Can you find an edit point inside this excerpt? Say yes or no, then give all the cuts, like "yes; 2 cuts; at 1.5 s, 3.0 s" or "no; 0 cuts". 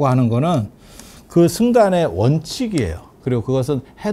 yes; 1 cut; at 3.2 s